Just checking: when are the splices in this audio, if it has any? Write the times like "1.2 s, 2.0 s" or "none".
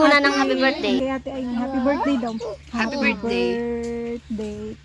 1.0 s

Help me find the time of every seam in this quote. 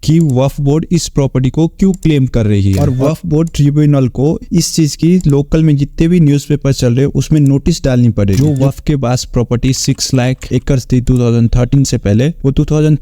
2.8 s, 8.4 s

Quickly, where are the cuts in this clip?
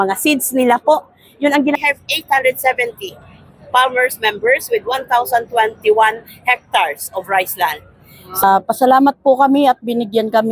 1.8 s, 8.4 s

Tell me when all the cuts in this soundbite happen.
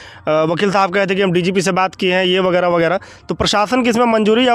none

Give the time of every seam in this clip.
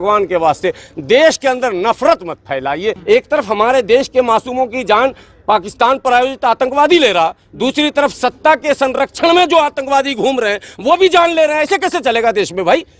3.0 s

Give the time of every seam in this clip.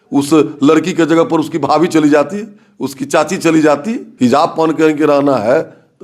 4.0 s

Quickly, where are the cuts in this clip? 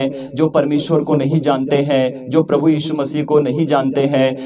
none

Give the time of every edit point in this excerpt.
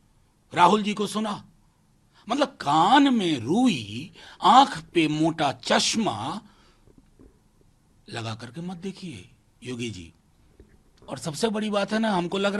none

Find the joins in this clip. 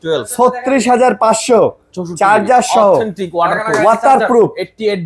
none

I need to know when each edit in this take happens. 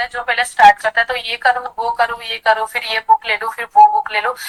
none

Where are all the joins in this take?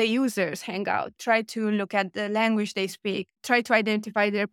1.1 s

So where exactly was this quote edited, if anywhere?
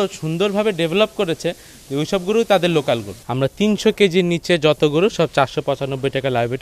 3.2 s

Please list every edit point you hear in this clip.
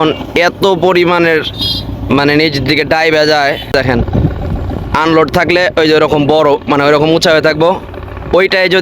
3.7 s

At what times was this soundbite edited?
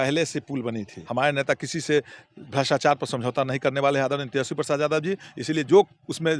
1.0 s

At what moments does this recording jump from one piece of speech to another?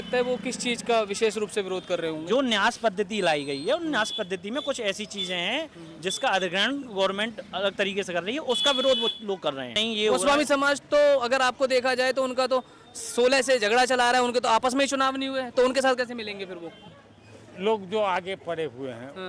9.8 s, 16.9 s

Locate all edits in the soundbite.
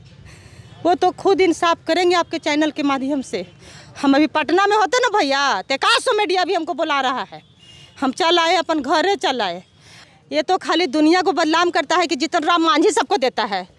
10.0 s

